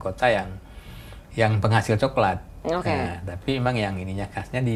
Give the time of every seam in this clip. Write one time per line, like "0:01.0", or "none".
none